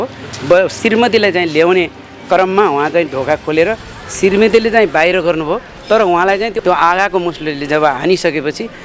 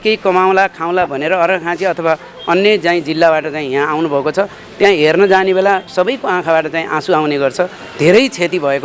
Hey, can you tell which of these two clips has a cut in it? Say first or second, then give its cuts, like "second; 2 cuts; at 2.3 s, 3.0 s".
first; 2 cuts; at 5.7 s, 6.6 s